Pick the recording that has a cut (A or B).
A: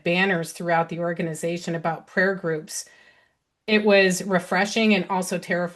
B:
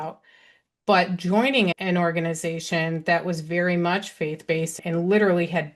B